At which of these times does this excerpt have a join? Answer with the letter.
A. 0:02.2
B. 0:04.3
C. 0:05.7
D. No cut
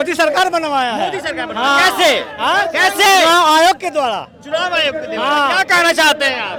D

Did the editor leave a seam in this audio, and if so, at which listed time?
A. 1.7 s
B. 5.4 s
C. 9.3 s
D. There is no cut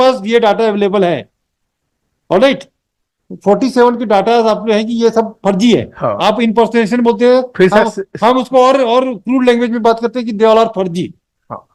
D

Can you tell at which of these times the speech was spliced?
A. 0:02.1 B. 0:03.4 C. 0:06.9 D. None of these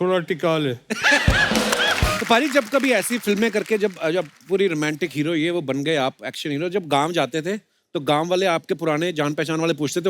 A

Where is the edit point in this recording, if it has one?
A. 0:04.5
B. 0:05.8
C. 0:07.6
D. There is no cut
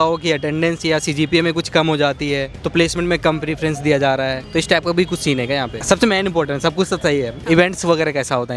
B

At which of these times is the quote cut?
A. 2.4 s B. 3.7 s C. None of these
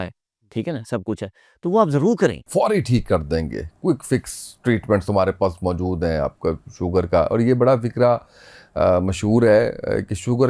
A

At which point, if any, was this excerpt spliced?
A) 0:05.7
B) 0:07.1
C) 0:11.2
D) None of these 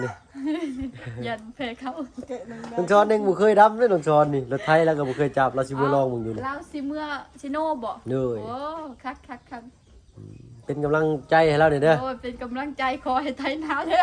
D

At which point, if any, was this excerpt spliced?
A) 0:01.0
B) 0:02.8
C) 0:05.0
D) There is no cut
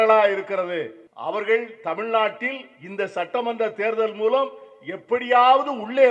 A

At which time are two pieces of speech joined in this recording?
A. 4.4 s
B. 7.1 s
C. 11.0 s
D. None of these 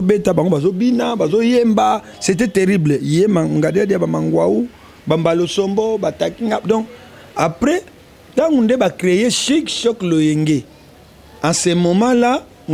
D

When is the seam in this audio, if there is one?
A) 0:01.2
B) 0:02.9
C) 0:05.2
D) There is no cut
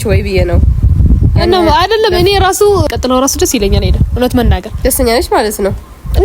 B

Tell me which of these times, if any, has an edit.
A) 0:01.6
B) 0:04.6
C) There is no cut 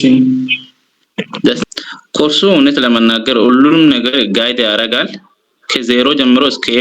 A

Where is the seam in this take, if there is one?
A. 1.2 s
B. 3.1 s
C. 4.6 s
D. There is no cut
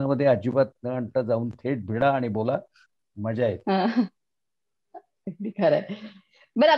D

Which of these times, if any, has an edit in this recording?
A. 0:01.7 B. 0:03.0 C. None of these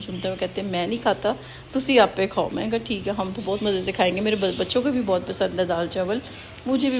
C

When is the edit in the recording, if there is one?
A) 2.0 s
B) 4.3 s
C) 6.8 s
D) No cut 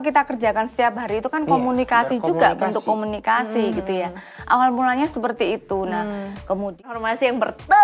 C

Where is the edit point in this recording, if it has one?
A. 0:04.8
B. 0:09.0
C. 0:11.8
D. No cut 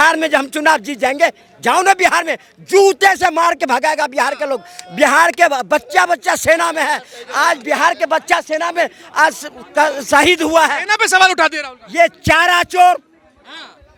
D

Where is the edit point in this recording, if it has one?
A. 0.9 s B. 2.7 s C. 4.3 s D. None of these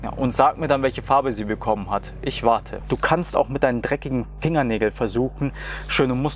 B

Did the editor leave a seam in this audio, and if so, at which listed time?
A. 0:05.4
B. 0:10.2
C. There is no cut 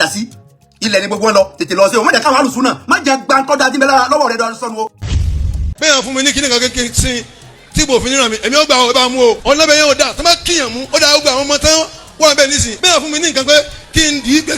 A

